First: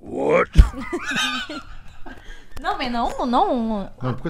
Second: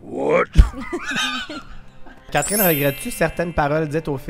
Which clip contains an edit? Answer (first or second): second